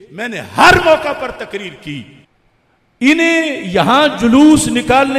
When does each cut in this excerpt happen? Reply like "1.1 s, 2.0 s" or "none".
2.2 s